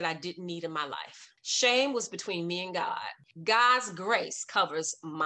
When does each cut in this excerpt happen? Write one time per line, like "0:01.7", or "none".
0:03.2